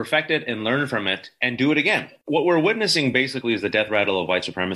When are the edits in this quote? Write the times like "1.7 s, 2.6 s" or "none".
2.2 s